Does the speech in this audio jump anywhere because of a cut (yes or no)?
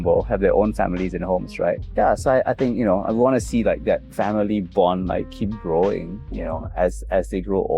no